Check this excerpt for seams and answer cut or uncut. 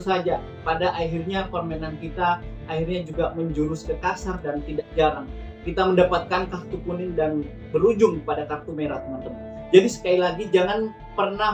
uncut